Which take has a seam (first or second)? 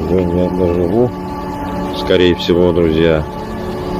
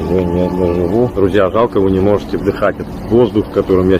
second